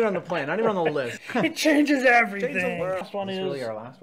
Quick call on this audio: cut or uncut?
cut